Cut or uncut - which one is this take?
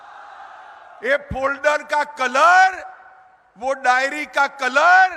uncut